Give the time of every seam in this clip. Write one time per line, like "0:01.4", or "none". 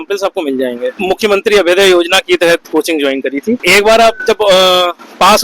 0:01.0
0:03.6